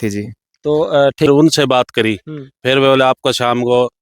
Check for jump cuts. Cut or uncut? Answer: cut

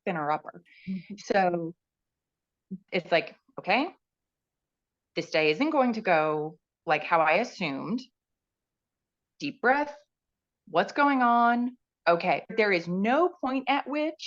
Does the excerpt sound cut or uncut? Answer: cut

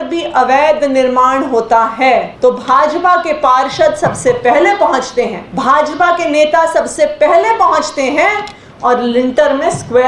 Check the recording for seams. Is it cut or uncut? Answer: cut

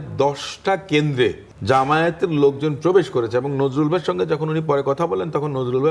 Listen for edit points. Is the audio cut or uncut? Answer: cut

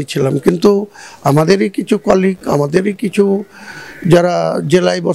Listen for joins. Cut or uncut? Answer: uncut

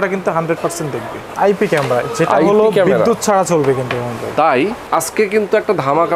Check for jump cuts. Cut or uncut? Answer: cut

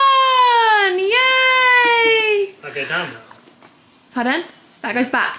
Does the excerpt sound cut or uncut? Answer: uncut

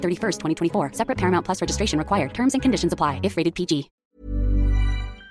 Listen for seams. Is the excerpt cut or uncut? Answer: cut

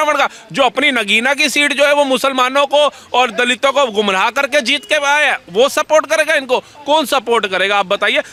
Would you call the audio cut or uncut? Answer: uncut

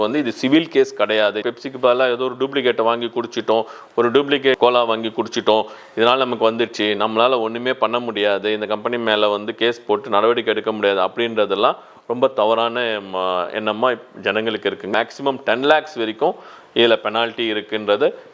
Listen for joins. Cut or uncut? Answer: cut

